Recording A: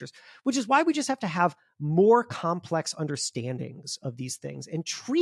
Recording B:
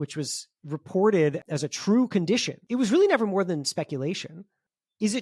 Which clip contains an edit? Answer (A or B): B